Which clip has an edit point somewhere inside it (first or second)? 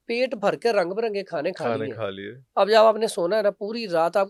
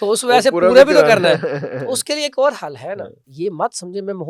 second